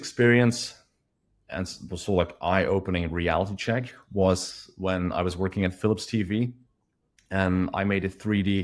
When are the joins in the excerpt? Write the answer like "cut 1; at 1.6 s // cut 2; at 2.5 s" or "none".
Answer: none